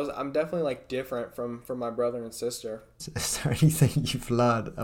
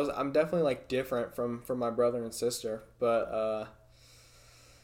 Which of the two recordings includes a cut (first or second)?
first